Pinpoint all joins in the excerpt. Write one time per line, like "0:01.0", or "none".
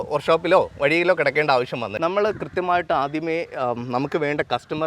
0:01.9